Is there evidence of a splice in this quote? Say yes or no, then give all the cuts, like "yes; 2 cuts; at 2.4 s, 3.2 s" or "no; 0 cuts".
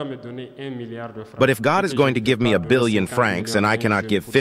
yes; 1 cut; at 1.2 s